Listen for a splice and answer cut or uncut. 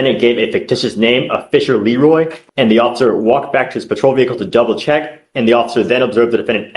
cut